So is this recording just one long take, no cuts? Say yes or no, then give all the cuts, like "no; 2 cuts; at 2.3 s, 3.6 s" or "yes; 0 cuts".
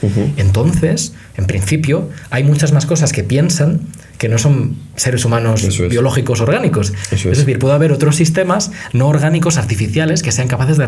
yes; 0 cuts